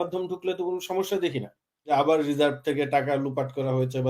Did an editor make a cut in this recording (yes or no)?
yes